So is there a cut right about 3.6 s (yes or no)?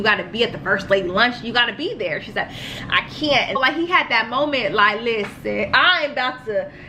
yes